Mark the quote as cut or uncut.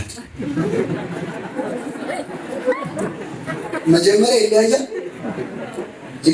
uncut